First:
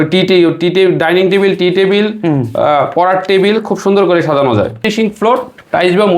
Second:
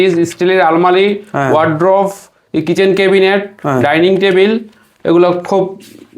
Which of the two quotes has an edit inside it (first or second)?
first